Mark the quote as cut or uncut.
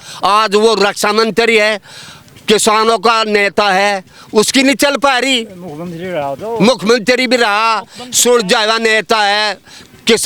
uncut